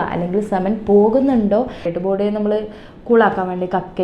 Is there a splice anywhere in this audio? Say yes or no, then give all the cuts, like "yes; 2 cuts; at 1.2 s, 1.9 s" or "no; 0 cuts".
yes; 1 cut; at 1.8 s